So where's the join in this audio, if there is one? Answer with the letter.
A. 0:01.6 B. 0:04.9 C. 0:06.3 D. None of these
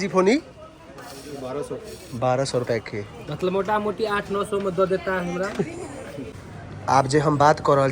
C